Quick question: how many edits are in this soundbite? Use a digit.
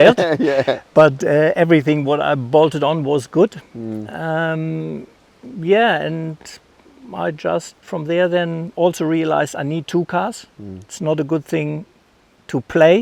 0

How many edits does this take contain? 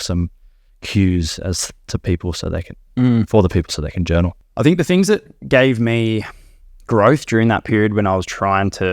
1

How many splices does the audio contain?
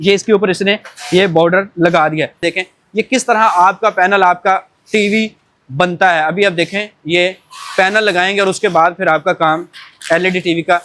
1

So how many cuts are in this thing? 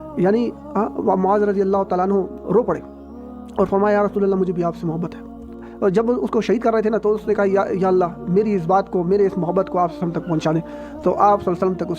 1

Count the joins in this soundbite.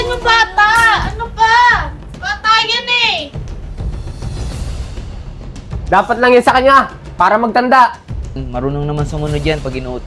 1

